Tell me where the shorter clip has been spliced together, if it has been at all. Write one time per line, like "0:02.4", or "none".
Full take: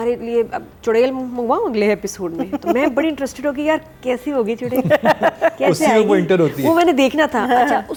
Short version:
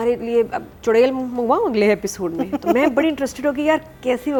none